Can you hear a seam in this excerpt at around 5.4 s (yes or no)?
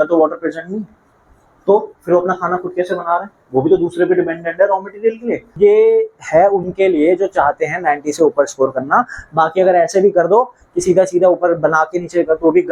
yes